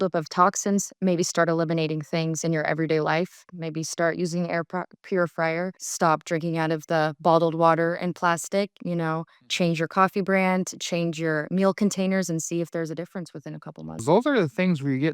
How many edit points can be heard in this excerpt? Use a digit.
1